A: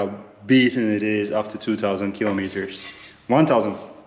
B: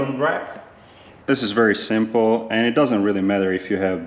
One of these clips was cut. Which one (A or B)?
B